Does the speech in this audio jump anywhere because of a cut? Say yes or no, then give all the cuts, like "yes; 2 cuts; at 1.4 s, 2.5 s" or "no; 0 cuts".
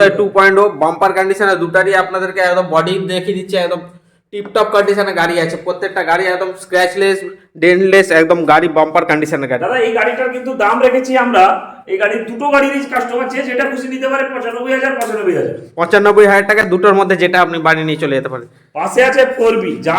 no; 0 cuts